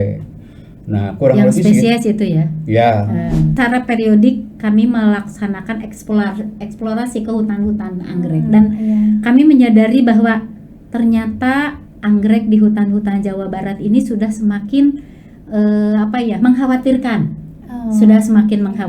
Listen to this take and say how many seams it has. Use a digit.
1